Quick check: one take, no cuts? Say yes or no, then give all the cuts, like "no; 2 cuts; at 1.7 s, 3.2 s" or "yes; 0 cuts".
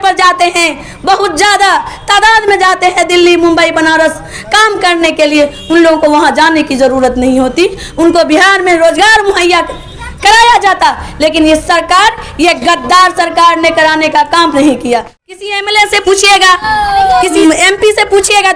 no; 2 cuts; at 15.5 s, 17.4 s